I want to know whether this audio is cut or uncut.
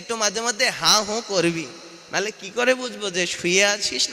uncut